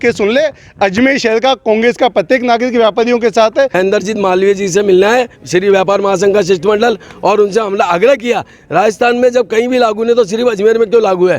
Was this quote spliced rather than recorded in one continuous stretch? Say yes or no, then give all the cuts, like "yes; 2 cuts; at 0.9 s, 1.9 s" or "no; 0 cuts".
yes; 1 cut; at 3.7 s